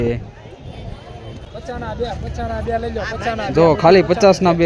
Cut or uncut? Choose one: cut